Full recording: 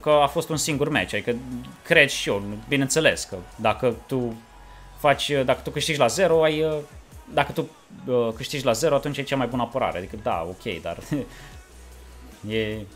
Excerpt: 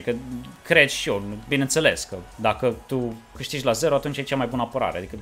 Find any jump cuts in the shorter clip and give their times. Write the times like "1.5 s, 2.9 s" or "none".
3.5 s